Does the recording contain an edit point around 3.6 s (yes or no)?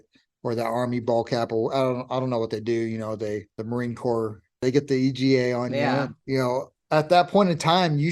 yes